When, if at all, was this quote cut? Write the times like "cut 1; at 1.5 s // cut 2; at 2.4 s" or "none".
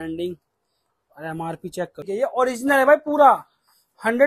cut 1; at 2.1 s